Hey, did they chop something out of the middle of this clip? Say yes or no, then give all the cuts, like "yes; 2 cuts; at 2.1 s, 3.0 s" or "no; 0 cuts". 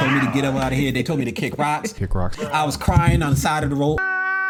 no; 0 cuts